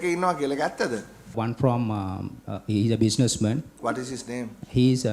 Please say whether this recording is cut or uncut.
cut